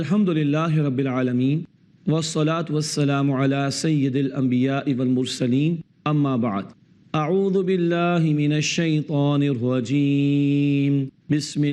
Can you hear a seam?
yes; 1 cut; at 1.0 s

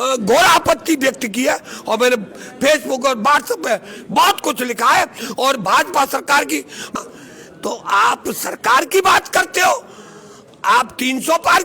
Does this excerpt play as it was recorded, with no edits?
no; 1 cut; at 6.9 s

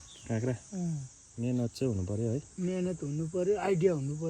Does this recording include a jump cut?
yes; 1 cut; at 1.2 s

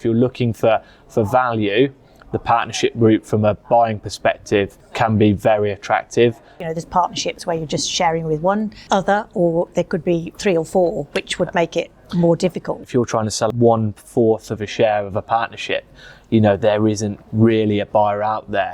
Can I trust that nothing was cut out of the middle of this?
no; 4 cuts; at 4.8 s, 6.6 s, 8.8 s, 13.0 s

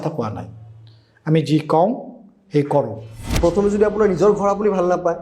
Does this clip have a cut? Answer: yes; 1 cut; at 3.2 s

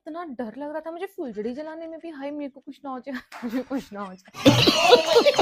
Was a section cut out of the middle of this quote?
no; 0 cuts

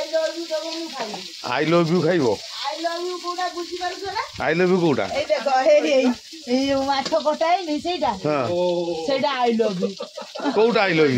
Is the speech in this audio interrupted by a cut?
no; 0 cuts

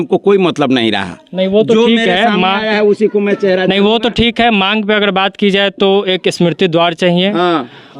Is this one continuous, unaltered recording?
yes; 0 cuts

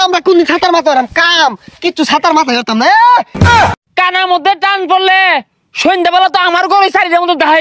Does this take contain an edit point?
yes; 2 cuts; at 1.1 s, 3.4 s

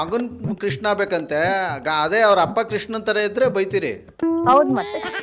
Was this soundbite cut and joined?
no; 0 cuts

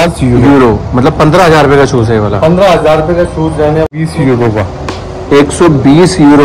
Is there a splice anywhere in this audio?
yes; 1 cut; at 3.9 s

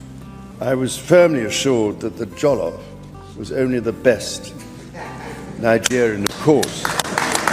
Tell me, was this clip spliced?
no; 0 cuts

